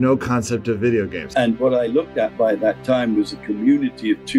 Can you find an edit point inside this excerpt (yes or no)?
yes